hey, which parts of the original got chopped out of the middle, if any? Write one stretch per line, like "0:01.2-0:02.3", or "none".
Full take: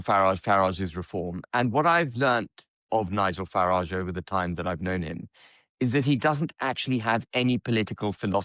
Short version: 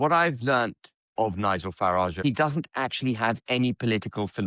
0:03.9-0:06.1